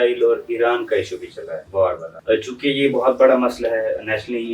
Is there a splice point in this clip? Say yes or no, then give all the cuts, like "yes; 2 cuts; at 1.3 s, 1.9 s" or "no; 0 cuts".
yes; 1 cut; at 2.1 s